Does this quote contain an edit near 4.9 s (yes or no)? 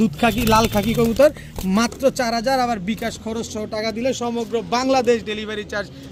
no